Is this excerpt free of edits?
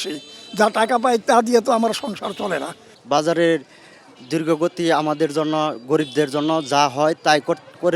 no; 1 cut; at 2.9 s

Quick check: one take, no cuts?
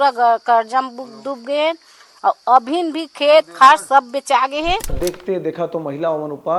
no; 1 cut; at 5.0 s

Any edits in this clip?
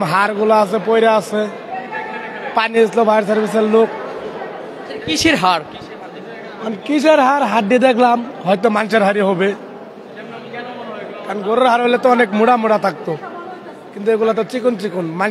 no; 0 cuts

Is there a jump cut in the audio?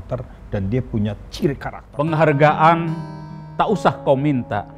yes; 1 cut; at 1.8 s

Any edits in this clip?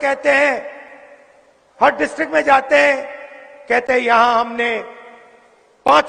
no; 0 cuts

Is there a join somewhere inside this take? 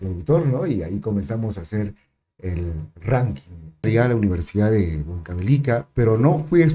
yes; 1 cut; at 3.9 s

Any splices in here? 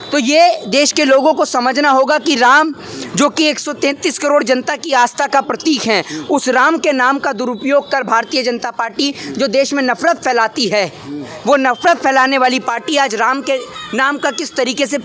no; 0 cuts

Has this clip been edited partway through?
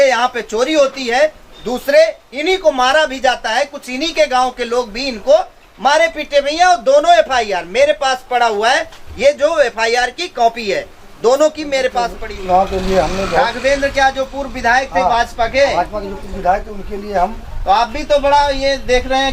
yes; 1 cut; at 12.2 s

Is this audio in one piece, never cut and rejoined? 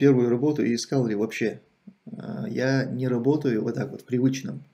yes; 0 cuts

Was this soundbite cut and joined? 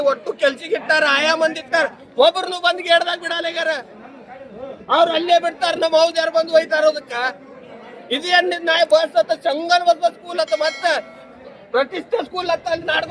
no; 0 cuts

